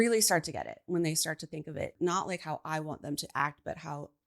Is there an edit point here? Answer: yes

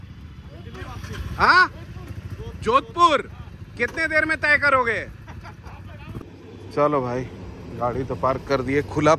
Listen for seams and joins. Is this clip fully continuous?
no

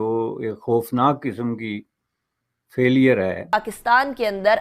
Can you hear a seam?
yes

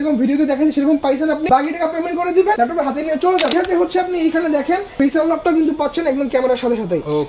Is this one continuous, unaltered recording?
no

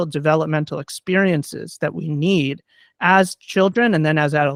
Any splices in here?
no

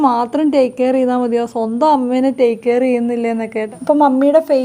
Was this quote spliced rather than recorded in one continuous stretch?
yes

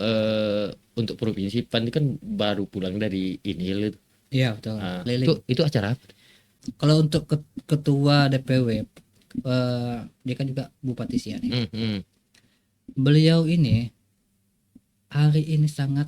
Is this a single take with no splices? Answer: no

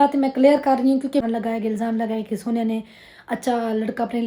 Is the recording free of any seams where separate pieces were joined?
no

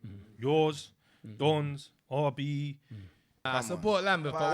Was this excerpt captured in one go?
no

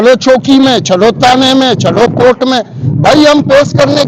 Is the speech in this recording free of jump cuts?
yes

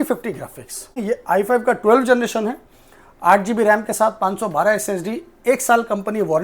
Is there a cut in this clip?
yes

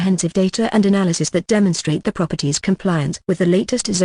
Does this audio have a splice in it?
yes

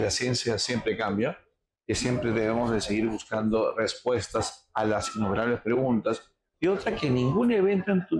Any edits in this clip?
no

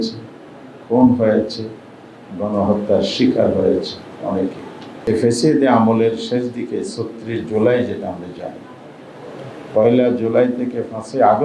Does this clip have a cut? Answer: no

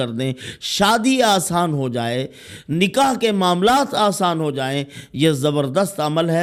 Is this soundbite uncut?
yes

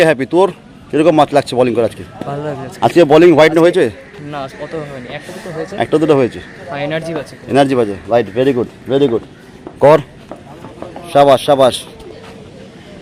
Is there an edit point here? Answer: no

